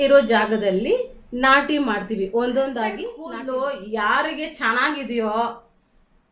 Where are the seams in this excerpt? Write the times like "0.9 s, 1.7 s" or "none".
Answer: 3.1 s